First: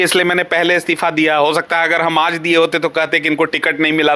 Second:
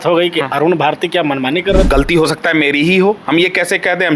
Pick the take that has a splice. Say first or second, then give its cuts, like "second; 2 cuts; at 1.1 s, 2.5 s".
second; 1 cut; at 1.9 s